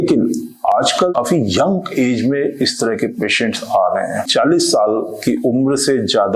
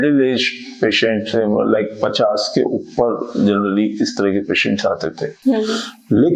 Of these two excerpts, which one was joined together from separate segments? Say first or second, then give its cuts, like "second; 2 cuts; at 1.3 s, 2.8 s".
first; 2 cuts; at 1.1 s, 4.3 s